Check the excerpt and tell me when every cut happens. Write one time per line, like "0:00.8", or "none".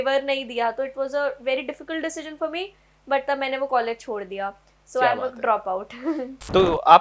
none